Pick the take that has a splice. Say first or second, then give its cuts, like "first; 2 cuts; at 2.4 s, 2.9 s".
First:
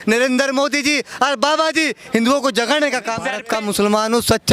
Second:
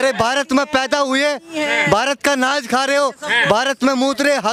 first; 1 cut; at 3.4 s